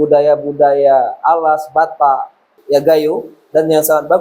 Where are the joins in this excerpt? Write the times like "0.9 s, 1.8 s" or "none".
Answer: 2.5 s